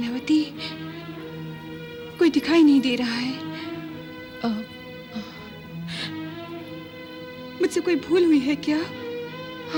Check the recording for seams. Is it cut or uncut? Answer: uncut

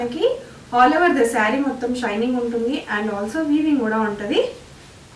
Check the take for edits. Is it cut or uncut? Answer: uncut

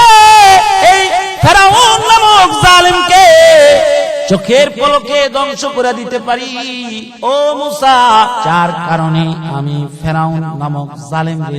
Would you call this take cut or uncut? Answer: cut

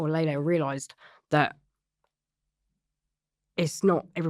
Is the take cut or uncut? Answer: uncut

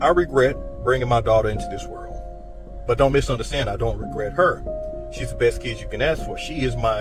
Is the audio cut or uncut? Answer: uncut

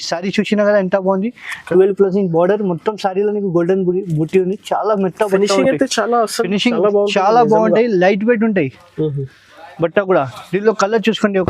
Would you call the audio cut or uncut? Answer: uncut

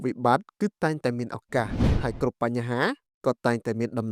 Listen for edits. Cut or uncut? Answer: cut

